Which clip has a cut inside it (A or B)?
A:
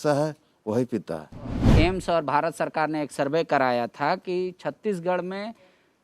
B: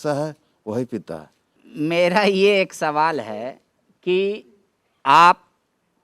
A